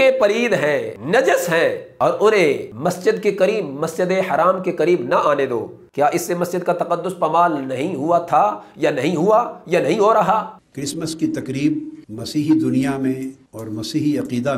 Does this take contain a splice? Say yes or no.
yes